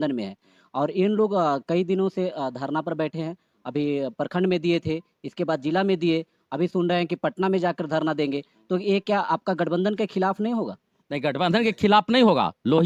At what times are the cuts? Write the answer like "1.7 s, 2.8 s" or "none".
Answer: none